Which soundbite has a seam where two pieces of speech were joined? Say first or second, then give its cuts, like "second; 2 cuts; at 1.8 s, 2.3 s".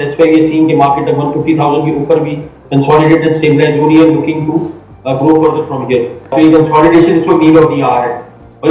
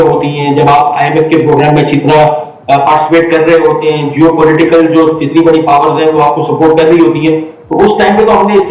first; 1 cut; at 6.3 s